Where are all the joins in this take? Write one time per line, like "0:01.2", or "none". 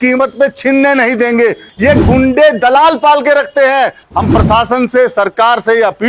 0:01.7
0:04.0